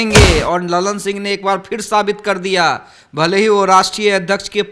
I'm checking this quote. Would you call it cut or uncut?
uncut